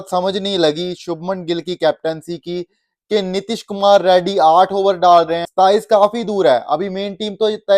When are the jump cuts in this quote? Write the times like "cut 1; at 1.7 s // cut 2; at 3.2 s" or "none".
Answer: cut 1; at 5.4 s

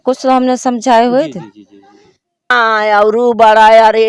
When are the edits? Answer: cut 1; at 2.5 s

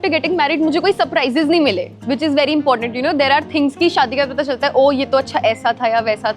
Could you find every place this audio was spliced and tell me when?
cut 1; at 1.9 s

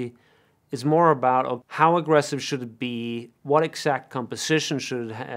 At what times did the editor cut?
cut 1; at 1.6 s

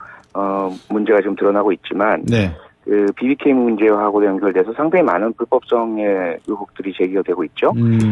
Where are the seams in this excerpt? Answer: none

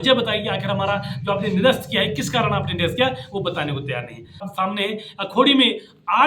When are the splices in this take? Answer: cut 1; at 4.5 s

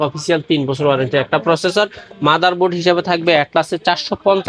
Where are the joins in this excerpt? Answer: none

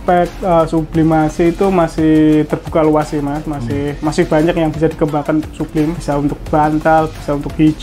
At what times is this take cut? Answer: none

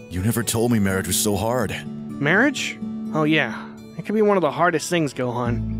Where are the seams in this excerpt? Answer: none

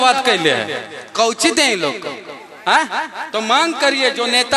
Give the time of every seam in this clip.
none

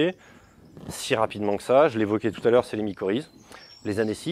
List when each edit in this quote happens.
cut 1; at 3.4 s

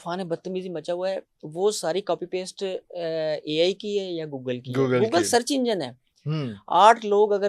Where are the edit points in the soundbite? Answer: none

